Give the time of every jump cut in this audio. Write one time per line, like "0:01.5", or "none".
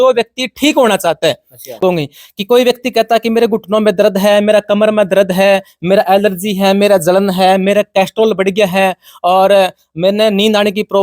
0:01.8